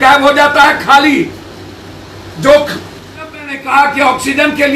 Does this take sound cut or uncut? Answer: cut